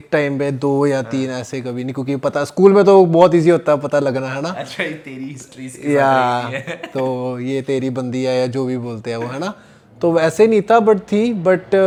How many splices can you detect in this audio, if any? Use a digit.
0